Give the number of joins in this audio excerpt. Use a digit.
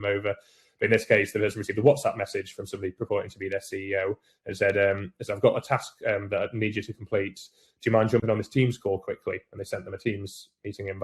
0